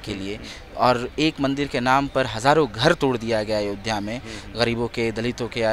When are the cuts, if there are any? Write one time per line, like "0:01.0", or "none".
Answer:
none